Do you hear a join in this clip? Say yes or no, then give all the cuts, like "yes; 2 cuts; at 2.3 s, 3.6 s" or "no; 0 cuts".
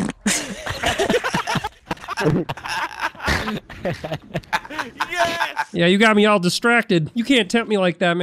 yes; 2 cuts; at 5.7 s, 7.1 s